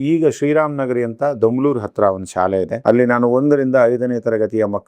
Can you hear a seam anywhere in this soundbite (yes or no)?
yes